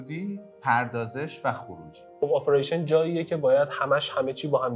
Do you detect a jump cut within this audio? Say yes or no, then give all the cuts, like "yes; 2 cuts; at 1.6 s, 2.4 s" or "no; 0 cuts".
yes; 1 cut; at 2.1 s